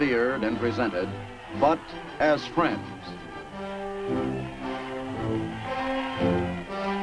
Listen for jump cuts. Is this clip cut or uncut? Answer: uncut